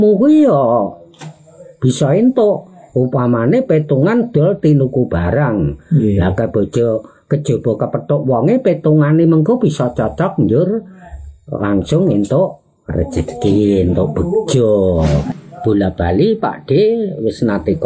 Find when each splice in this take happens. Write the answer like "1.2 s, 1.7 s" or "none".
15.3 s

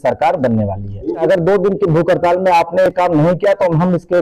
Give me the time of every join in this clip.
1.2 s

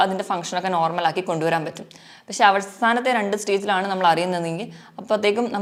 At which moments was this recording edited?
none

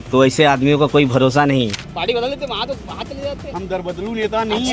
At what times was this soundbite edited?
1.7 s, 3.5 s

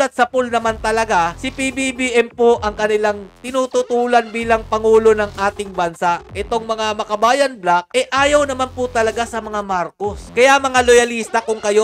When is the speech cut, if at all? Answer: 10.2 s

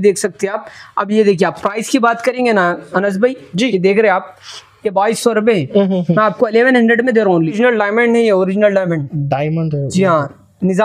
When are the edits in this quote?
7.4 s

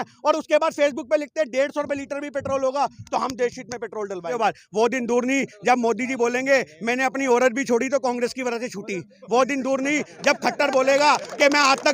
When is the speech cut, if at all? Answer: 4.4 s

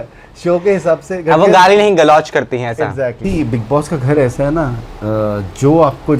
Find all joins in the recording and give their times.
3.2 s

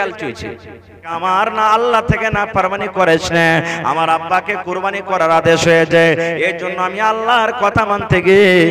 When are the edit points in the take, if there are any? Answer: 1.1 s

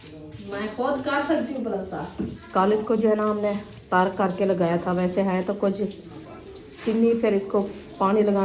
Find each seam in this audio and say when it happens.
2.4 s

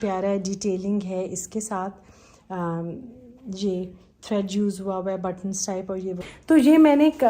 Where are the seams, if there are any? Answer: 6.3 s

